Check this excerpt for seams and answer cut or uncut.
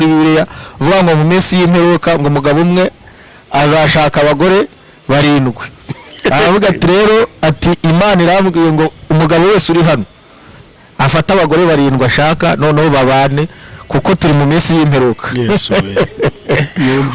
uncut